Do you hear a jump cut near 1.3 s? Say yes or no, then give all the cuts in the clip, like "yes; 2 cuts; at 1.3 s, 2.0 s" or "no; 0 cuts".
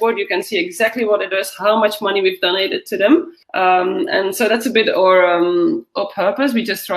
no; 1 cut; at 3.4 s